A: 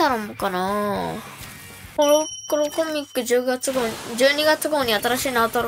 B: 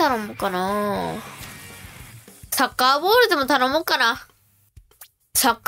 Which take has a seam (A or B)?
A